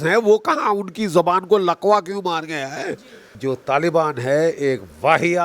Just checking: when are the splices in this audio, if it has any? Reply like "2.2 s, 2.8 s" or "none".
3.3 s